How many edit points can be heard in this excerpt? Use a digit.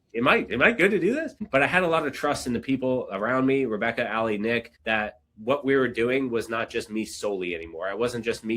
2